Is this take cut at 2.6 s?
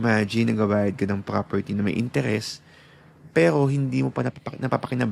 no; 0 cuts

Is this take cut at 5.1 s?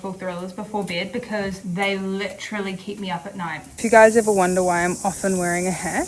no; 2 cuts; at 1.6 s, 3.7 s

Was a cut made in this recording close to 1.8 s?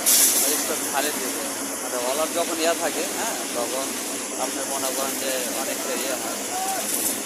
no; 0 cuts

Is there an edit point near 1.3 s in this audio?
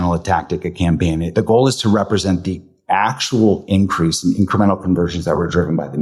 yes; 1 cut; at 1.3 s

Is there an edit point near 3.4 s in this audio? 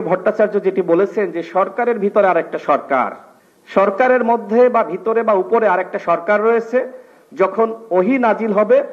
yes; 1 cut; at 3.4 s

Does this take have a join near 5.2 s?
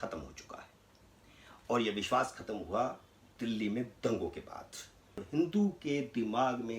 yes; 1 cut; at 5.2 s

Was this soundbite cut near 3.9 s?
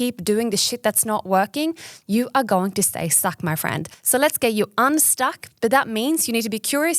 yes; 1 cut; at 3.9 s

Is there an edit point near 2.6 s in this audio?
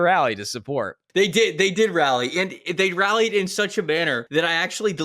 no; 2 cuts; at 1.0 s, 4.2 s

